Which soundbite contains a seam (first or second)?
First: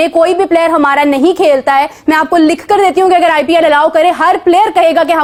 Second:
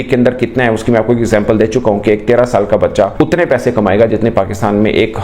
second